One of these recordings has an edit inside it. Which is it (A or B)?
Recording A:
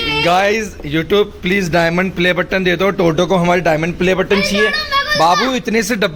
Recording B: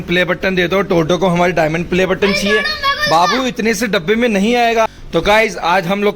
B